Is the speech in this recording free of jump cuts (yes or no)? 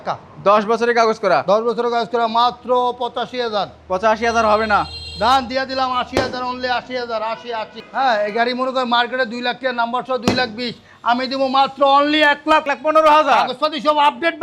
no